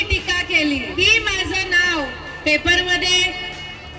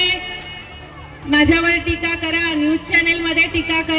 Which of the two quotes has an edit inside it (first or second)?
first